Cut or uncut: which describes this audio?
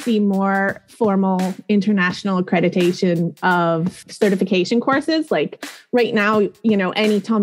cut